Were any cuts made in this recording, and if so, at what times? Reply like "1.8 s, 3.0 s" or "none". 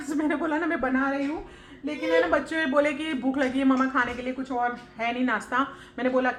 none